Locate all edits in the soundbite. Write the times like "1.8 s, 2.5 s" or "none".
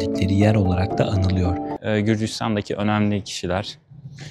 1.7 s